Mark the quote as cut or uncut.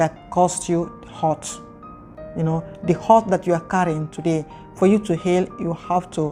uncut